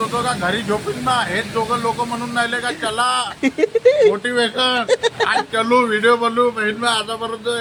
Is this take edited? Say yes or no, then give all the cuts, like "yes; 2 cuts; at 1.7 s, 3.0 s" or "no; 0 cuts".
no; 0 cuts